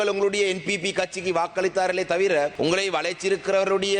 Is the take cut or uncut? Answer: cut